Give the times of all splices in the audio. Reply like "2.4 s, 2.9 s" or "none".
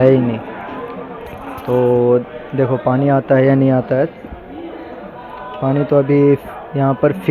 none